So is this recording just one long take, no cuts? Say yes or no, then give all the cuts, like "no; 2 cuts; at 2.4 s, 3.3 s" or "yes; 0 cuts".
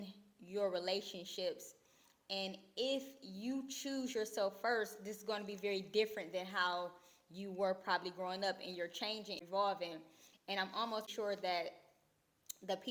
no; 2 cuts; at 9.4 s, 11.1 s